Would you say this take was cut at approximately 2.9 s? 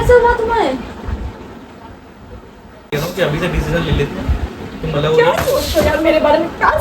yes; 1 cut; at 2.9 s

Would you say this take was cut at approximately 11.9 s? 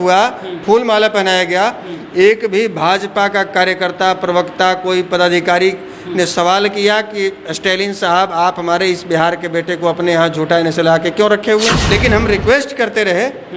yes; 1 cut; at 11.9 s

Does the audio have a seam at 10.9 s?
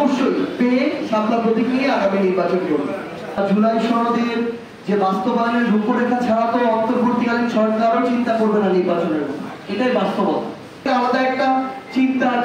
yes; 2 cuts; at 3.4 s, 10.9 s

